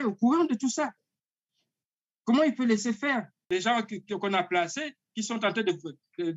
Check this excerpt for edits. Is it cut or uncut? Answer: cut